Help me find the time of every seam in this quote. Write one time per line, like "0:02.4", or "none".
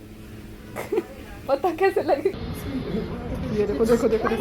0:02.4